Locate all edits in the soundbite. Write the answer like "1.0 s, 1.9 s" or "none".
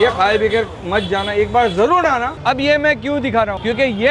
2.4 s